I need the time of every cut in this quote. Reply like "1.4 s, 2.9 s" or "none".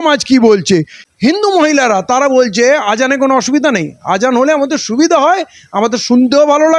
1.0 s